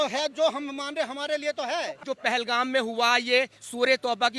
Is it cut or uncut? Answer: cut